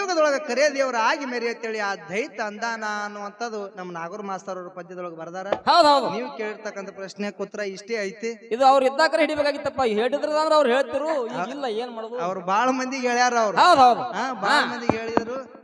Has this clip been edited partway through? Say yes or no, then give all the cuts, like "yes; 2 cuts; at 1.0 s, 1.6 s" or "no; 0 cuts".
no; 0 cuts